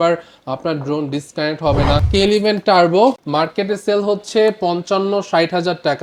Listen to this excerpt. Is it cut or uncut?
cut